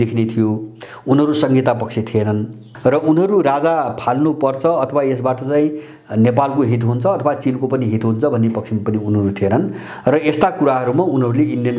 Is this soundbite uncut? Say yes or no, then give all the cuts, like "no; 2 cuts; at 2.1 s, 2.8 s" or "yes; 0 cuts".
no; 1 cut; at 2.6 s